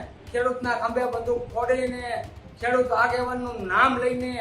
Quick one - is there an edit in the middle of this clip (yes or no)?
no